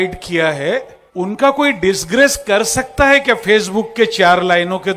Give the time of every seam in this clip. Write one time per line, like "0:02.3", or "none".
0:01.0